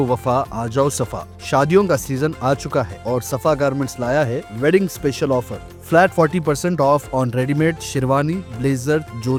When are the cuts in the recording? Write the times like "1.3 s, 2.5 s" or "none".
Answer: none